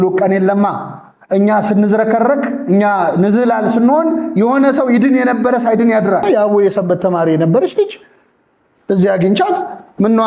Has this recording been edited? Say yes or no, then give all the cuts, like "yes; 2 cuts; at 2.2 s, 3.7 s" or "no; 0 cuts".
yes; 1 cut; at 6.3 s